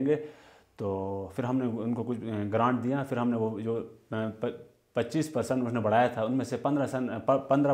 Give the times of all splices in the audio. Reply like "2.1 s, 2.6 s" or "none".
none